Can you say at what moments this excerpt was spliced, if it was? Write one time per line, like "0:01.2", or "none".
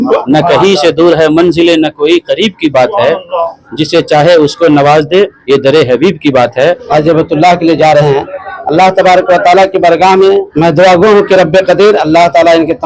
0:06.8
0:10.5